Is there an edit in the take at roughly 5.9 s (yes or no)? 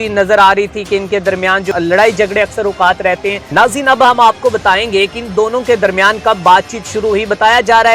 no